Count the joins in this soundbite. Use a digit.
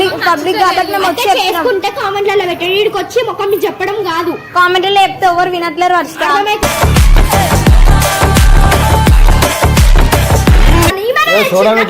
1